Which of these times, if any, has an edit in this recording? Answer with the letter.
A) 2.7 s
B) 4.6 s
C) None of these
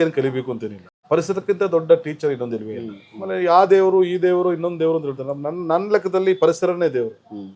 C